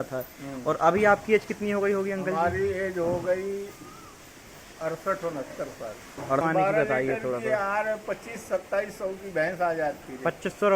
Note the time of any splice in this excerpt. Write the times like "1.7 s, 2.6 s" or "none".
6.4 s